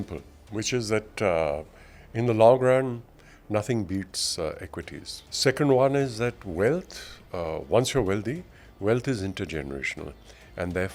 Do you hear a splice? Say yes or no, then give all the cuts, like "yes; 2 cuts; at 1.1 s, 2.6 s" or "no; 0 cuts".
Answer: no; 0 cuts